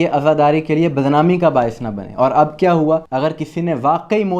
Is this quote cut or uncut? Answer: cut